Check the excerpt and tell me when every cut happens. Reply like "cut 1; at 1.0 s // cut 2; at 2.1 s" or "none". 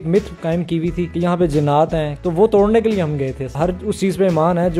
cut 1; at 1.1 s // cut 2; at 2.1 s // cut 3; at 3.5 s